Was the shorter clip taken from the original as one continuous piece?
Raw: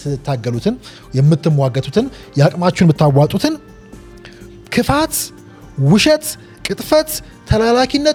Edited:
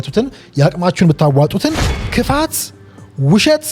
no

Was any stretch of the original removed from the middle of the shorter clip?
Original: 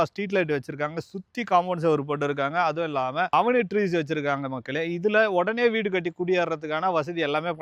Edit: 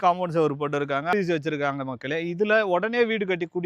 yes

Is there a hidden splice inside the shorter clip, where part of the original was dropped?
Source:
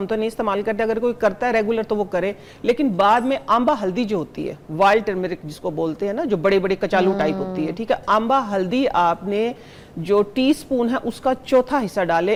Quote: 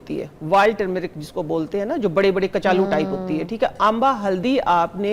no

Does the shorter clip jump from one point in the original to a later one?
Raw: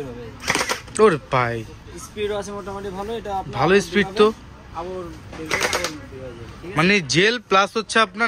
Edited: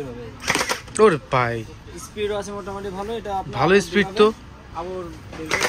no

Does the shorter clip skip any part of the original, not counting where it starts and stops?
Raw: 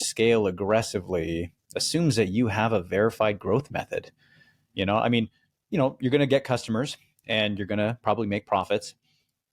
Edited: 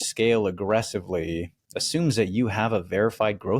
no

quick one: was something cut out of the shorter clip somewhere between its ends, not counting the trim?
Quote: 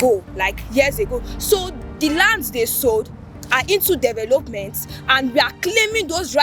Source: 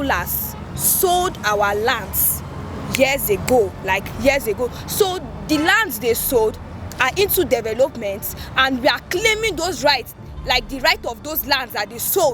no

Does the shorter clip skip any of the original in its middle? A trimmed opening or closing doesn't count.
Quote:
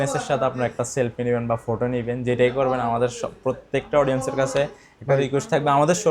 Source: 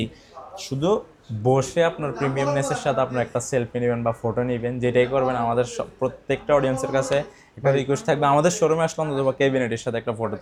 no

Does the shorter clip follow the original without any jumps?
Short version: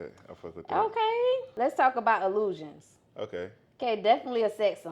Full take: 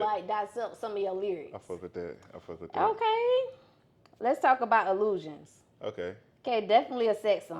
no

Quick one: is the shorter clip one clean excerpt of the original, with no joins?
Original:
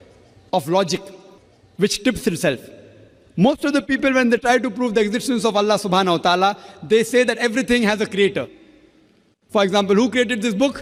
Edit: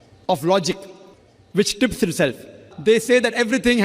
no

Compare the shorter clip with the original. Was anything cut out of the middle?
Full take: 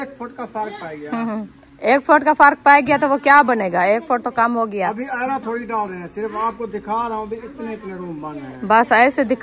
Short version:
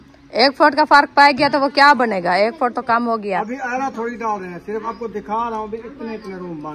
yes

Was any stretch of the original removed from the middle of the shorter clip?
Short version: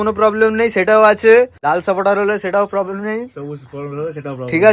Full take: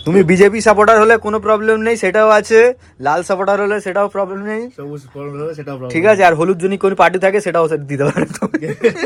yes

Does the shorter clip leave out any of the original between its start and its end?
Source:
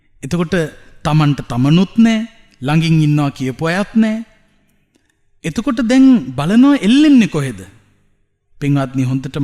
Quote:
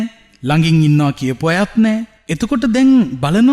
yes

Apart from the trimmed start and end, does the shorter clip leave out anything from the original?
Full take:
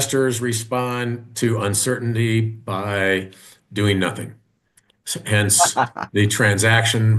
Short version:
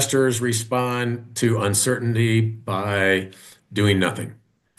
no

